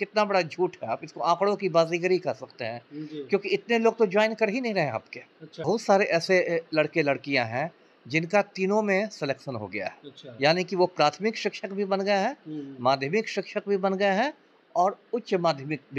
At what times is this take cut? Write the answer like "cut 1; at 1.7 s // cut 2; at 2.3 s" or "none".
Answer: cut 1; at 5.6 s